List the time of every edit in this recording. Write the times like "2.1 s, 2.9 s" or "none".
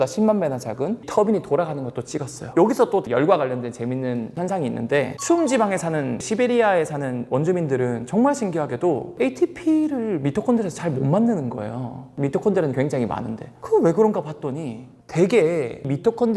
none